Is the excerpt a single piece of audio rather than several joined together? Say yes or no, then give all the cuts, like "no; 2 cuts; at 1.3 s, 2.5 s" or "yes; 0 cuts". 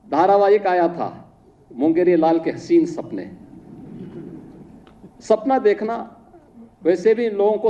yes; 0 cuts